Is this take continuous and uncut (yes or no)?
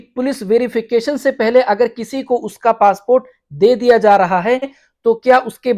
yes